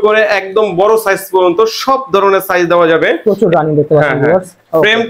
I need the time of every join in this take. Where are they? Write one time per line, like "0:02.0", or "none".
0:03.2